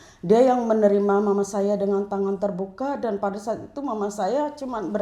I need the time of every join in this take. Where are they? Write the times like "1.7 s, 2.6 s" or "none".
none